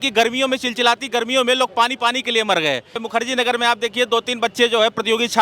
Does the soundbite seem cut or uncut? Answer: cut